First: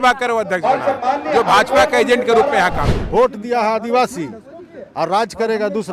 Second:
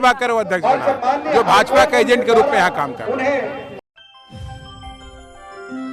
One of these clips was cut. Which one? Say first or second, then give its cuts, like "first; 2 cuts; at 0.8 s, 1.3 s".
first; 1 cut; at 2.9 s